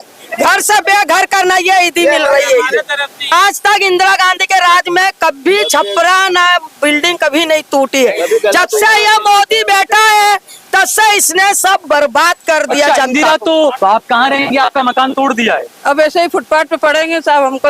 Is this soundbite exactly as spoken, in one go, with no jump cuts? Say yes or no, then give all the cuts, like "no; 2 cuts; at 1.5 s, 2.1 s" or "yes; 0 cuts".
no; 2 cuts; at 3.3 s, 13.8 s